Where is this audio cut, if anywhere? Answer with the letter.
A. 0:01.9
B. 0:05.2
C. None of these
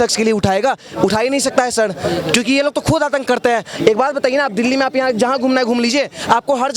C